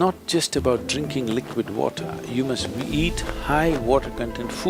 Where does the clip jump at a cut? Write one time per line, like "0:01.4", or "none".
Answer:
none